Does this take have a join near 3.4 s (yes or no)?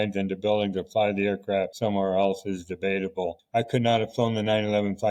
yes